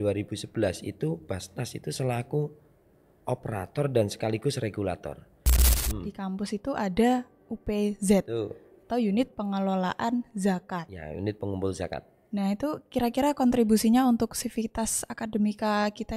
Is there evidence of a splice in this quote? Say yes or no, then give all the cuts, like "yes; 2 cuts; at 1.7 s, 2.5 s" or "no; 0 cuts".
yes; 1 cut; at 5.7 s